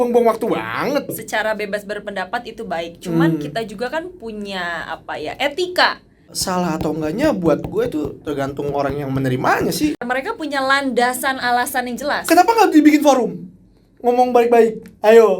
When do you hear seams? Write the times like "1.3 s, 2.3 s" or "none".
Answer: 1.1 s, 6.3 s, 10.0 s